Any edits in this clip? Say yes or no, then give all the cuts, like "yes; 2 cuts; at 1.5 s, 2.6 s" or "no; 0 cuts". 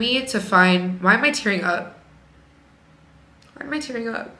no; 0 cuts